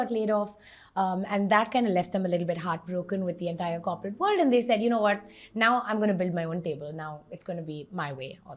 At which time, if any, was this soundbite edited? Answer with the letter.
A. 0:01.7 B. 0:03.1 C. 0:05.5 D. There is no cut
D